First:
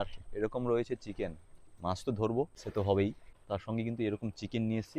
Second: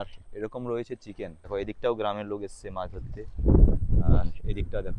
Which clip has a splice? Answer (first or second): second